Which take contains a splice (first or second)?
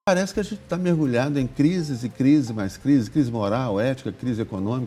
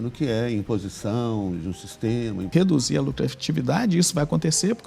second